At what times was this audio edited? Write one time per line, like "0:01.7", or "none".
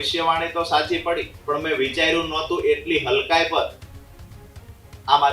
0:01.3